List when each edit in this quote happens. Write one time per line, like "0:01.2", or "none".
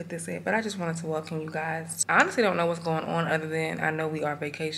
0:02.0